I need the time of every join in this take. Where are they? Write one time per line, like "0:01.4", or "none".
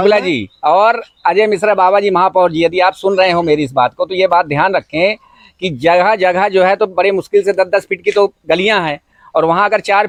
none